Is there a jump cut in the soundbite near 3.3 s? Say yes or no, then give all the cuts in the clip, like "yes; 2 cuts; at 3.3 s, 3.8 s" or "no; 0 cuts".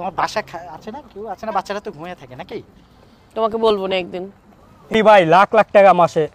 no; 1 cut; at 4.9 s